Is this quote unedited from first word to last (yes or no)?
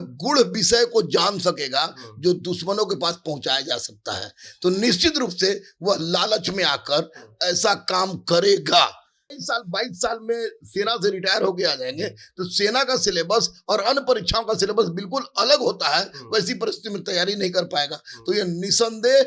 no